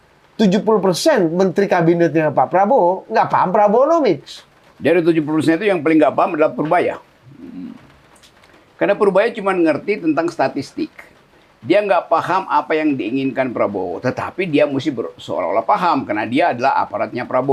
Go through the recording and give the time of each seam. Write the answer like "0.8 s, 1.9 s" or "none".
none